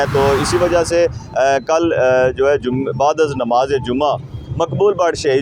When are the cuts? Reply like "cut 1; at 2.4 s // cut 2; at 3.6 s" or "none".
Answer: none